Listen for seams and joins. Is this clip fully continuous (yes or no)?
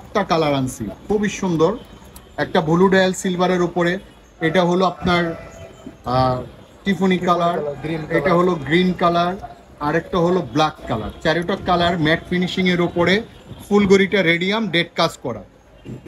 yes